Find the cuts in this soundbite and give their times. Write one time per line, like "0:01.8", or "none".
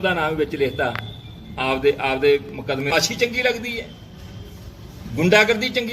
0:02.9